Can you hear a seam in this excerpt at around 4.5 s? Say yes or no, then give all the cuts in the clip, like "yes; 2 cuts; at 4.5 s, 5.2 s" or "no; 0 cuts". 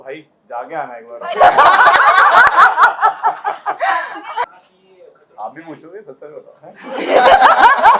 yes; 1 cut; at 4.5 s